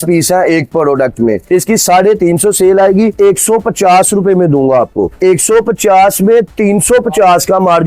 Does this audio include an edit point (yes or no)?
yes